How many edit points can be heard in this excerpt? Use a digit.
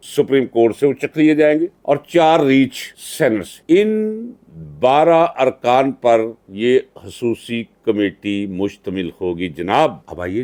0